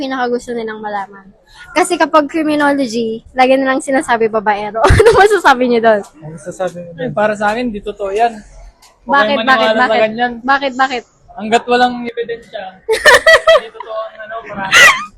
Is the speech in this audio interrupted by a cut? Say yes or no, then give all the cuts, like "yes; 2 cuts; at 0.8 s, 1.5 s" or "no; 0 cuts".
no; 0 cuts